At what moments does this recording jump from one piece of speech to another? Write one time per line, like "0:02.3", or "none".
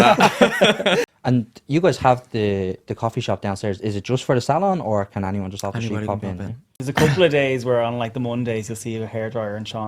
0:01.0
0:06.7